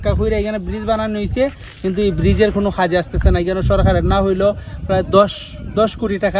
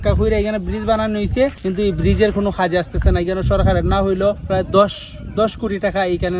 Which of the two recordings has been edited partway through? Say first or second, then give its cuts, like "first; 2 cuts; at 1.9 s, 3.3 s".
second; 2 cuts; at 1.6 s, 4.4 s